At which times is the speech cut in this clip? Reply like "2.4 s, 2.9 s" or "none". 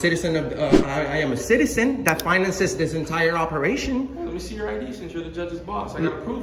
none